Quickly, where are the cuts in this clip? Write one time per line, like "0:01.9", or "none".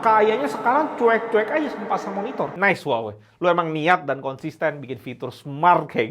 0:02.5

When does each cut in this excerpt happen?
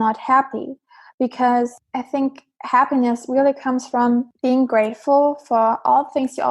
0:01.8
0:04.3

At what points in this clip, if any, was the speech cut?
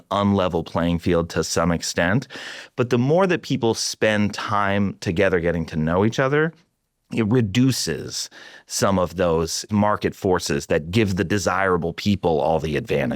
0:09.7

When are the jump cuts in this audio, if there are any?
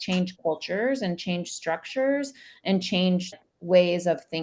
0:03.3

